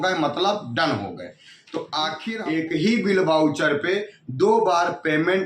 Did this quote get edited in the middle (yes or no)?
yes